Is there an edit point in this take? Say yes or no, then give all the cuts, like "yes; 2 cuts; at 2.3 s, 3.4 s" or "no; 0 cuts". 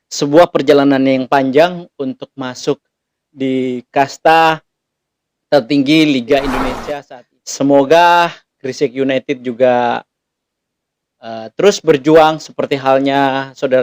yes; 1 cut; at 6.8 s